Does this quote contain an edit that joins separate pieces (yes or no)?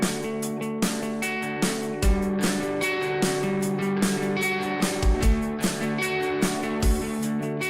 yes